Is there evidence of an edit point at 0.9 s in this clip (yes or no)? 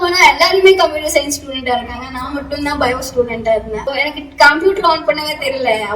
no